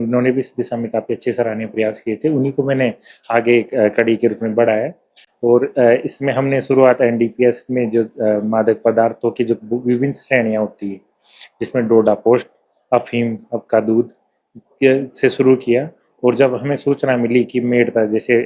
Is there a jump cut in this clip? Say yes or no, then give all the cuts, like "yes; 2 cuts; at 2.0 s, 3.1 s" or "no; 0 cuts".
no; 0 cuts